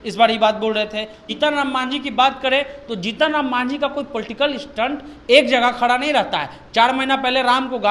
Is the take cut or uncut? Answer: cut